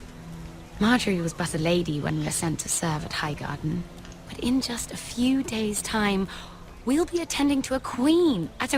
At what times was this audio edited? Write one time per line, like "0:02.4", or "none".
0:07.8